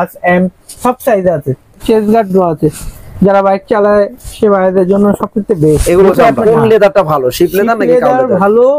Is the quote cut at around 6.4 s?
yes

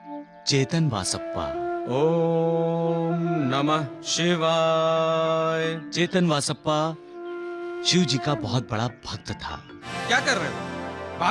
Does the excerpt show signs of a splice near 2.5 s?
no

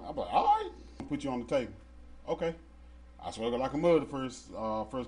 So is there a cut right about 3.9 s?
no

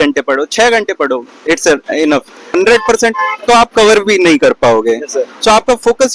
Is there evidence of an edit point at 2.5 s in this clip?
yes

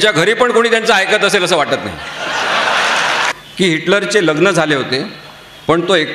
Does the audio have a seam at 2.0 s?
no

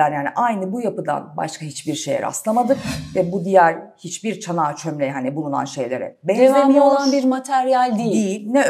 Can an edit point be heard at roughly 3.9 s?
no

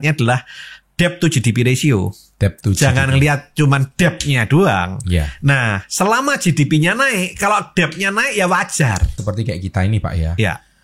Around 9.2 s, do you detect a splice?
yes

